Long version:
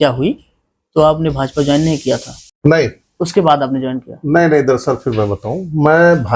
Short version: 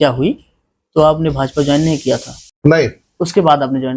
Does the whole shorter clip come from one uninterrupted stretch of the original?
yes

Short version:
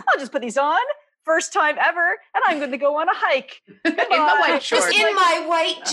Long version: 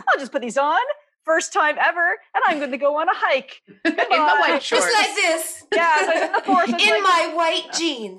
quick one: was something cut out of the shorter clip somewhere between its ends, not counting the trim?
yes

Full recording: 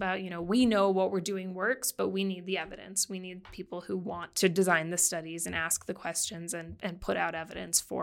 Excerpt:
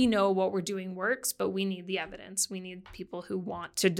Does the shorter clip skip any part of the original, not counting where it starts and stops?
no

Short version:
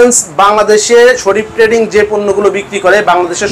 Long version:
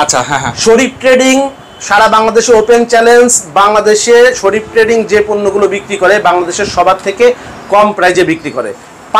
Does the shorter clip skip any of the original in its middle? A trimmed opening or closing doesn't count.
no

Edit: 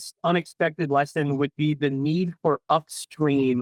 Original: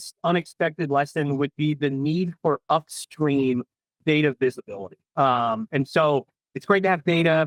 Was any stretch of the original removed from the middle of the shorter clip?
no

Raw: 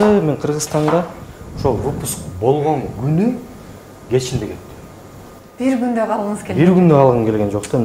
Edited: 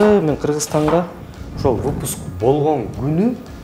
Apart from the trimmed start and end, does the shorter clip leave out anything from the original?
no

